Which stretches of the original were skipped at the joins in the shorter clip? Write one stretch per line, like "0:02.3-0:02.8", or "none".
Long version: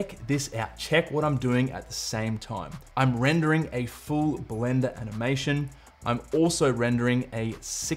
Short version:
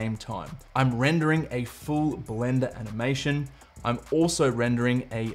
none